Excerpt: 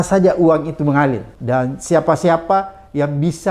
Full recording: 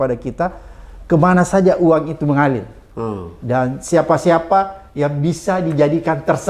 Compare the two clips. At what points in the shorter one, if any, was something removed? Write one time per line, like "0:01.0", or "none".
0:01.3

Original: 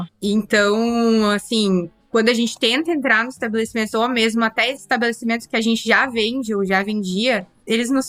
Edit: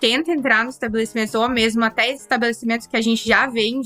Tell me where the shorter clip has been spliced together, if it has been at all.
none

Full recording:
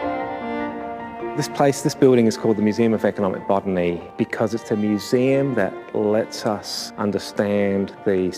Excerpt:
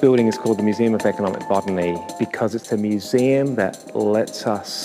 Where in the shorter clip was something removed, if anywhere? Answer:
none

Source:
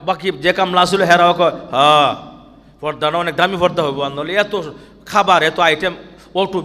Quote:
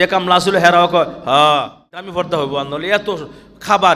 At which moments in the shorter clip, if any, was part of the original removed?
0:02.1

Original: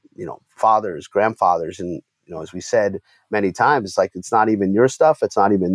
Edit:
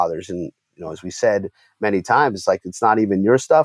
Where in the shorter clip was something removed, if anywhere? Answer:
none

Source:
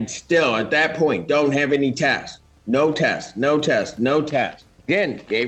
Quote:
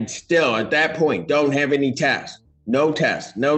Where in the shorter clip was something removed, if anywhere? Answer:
none

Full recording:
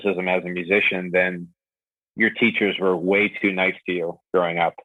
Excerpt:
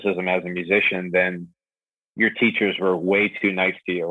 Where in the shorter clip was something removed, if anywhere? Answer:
none

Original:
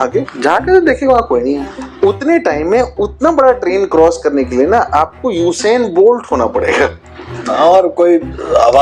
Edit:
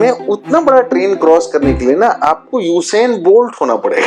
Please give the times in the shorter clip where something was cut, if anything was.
none

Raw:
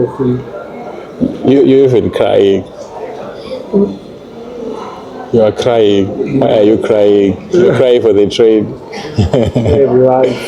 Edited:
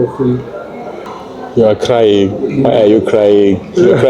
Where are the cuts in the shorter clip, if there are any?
0:01.1

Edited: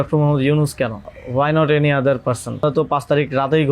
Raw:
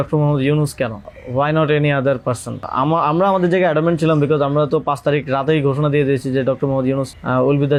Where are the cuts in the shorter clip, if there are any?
0:02.6

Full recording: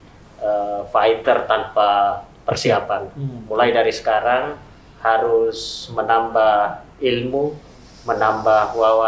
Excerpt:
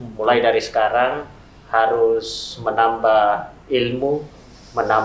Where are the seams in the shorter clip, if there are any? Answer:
none

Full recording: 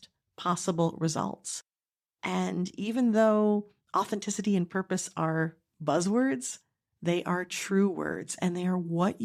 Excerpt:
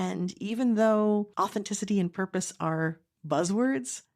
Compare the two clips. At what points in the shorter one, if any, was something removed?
0:01.3

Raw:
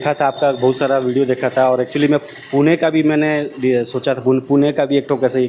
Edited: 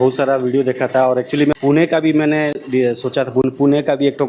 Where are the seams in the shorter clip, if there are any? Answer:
0:01.6

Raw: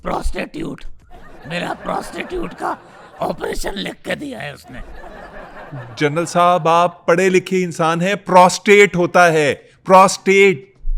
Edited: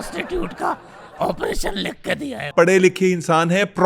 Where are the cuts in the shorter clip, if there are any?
0:02.5

